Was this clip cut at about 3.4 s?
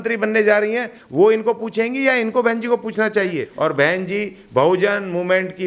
yes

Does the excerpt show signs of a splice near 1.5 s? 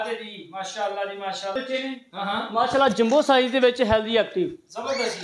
yes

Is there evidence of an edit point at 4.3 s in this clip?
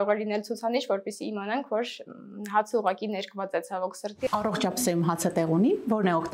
yes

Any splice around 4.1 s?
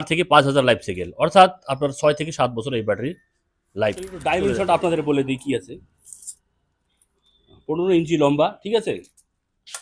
yes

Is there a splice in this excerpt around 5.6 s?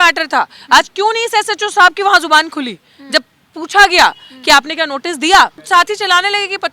yes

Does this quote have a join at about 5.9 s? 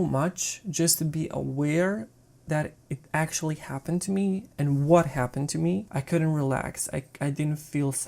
yes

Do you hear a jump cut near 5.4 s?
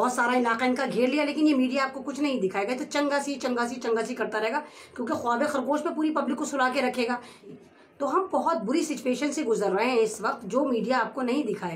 no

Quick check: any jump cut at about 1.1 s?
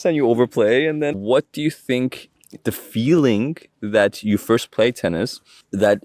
yes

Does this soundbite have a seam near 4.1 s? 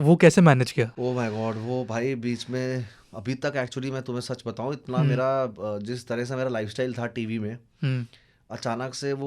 no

